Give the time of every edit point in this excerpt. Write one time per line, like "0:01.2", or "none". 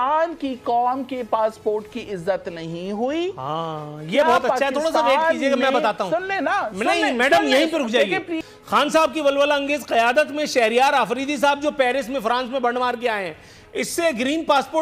none